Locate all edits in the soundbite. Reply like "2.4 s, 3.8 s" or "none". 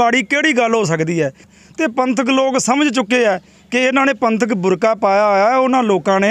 1.5 s